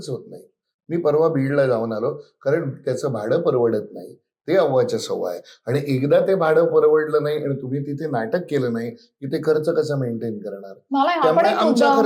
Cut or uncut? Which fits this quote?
uncut